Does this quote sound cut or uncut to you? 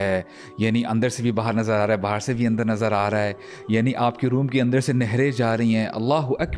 uncut